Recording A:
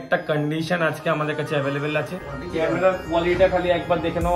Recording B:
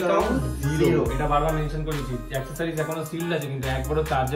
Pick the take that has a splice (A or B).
A